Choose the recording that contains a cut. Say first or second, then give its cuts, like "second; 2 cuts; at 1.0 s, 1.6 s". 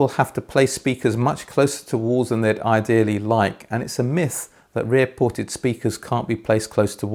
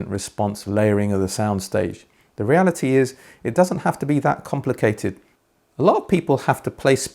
second; 1 cut; at 5.3 s